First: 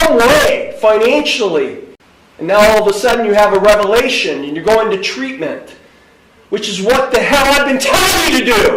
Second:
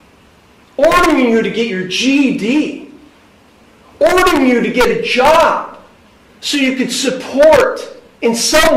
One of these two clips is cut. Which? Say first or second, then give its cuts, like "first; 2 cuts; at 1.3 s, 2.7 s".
first; 1 cut; at 1.9 s